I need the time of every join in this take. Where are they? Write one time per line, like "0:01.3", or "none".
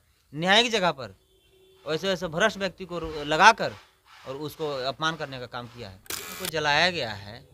0:06.2